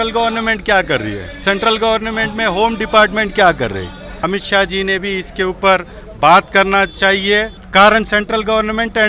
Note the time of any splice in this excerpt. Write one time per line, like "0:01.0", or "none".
0:04.1
0:07.6